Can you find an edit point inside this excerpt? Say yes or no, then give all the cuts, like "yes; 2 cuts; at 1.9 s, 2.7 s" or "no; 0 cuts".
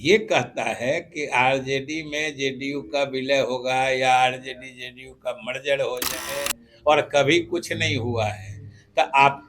yes; 1 cut; at 6.3 s